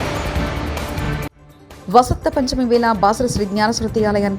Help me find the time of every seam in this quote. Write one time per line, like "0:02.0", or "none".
0:01.2